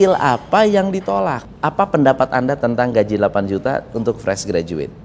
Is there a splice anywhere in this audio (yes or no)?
yes